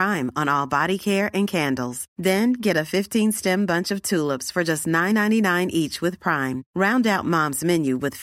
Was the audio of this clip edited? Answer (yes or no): no